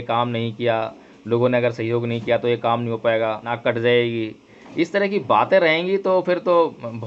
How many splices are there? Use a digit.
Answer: 1